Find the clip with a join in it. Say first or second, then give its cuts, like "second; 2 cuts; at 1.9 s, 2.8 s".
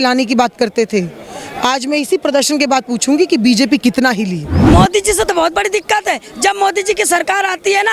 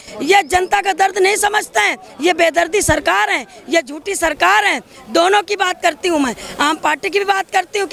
first; 1 cut; at 4.5 s